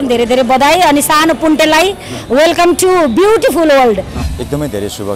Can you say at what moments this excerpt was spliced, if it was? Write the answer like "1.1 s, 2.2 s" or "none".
4.2 s